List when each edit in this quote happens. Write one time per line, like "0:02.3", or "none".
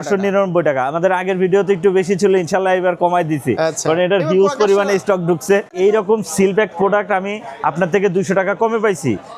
0:05.7